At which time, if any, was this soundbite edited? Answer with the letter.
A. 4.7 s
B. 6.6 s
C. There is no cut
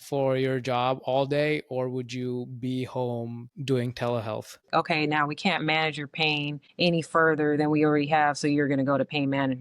A